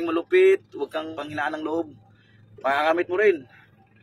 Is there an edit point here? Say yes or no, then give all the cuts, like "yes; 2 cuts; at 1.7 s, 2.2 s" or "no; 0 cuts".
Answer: yes; 1 cut; at 1.1 s